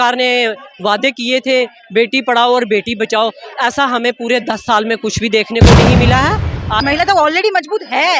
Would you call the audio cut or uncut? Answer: cut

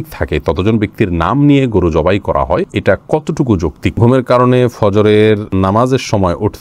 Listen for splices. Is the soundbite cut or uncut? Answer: cut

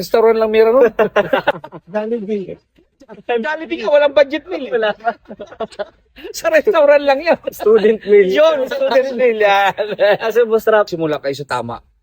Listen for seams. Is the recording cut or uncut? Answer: cut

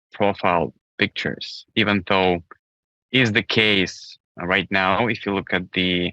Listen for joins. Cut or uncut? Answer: uncut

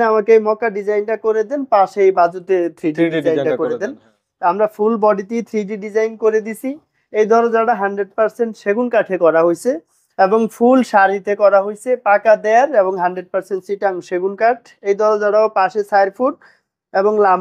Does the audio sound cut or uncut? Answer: uncut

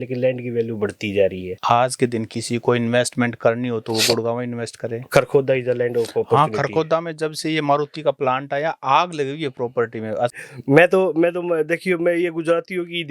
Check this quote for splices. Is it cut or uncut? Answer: cut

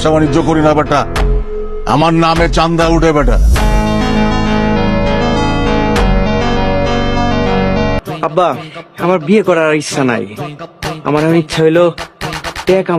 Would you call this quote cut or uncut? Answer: cut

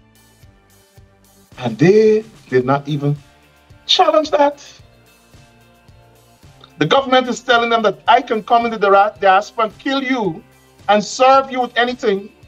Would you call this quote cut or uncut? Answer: uncut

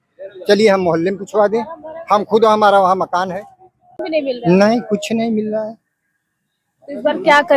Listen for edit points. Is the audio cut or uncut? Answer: cut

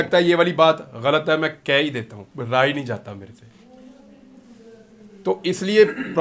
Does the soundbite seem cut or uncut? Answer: uncut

